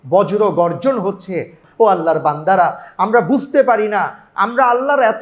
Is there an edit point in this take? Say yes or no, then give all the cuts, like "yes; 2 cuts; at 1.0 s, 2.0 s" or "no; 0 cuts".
yes; 1 cut; at 1.6 s